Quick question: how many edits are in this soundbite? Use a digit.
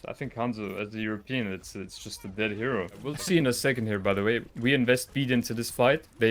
1